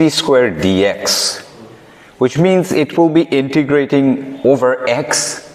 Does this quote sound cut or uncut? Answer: uncut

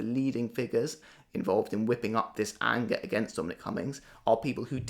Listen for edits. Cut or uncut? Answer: cut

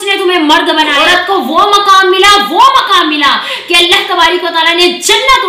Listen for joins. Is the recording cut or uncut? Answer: cut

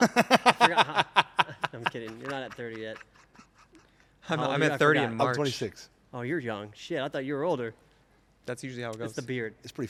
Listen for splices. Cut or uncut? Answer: uncut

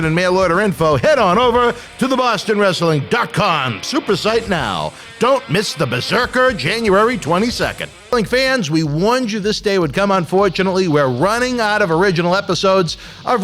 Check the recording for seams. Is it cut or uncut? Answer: cut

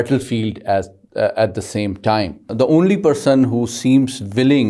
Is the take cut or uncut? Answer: cut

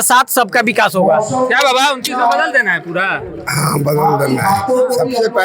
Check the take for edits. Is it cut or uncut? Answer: uncut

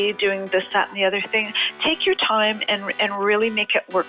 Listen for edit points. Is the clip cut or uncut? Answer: uncut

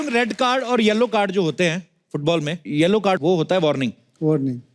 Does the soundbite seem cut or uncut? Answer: cut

